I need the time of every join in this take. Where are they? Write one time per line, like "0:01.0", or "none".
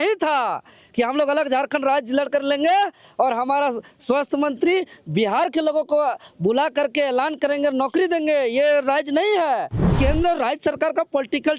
0:09.9